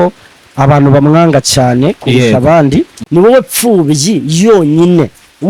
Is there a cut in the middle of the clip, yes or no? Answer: yes